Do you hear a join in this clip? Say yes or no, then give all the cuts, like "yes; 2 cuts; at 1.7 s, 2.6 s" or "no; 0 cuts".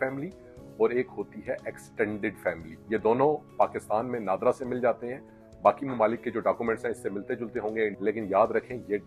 yes; 2 cuts; at 2.7 s, 7.9 s